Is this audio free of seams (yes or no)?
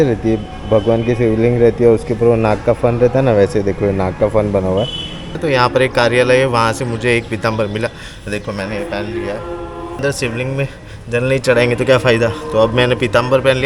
no